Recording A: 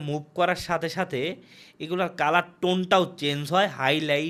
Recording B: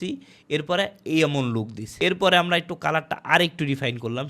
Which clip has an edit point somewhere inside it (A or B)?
B